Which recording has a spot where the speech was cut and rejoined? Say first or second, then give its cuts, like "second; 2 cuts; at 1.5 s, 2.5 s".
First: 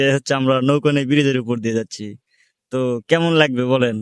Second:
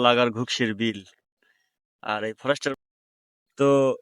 second; 1 cut; at 2.8 s